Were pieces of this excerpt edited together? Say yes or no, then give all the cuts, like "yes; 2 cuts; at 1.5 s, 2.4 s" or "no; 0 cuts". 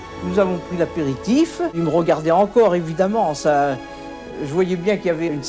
yes; 1 cut; at 1.7 s